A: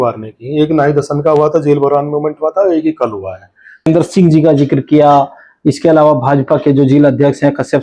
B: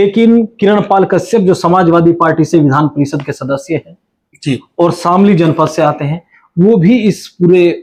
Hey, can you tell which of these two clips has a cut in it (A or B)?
A